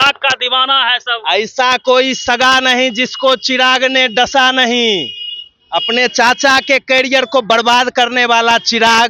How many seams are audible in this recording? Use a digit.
0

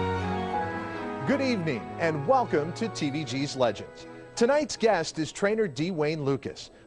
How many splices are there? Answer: 0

